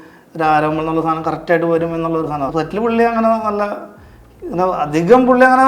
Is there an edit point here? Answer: yes; 1 cut; at 2.5 s

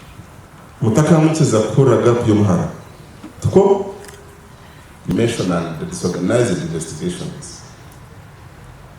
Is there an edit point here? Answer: yes; 1 cut; at 5.1 s

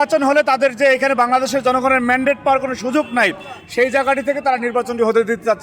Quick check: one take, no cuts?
yes; 0 cuts

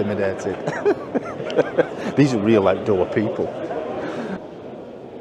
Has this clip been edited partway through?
no; 0 cuts

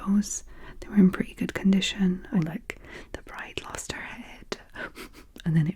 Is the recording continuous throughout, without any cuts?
no; 1 cut; at 2.2 s

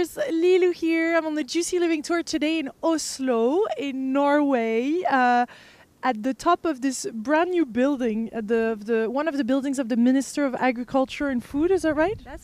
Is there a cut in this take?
no; 0 cuts

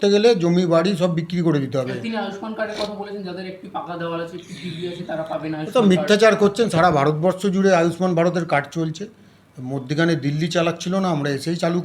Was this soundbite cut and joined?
no; 0 cuts

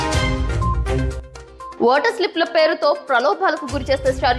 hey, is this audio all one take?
no; 1 cut; at 1.7 s

